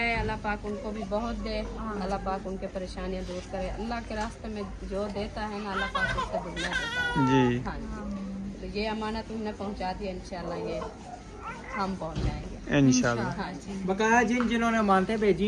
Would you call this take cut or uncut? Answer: uncut